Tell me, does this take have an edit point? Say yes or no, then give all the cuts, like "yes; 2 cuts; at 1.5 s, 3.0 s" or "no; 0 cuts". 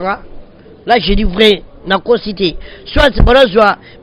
no; 0 cuts